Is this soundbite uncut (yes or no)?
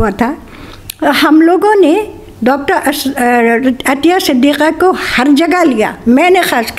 yes